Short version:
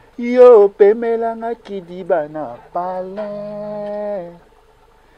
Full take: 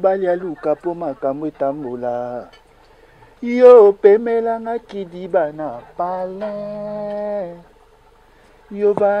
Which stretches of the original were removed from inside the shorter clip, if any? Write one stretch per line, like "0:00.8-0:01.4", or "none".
none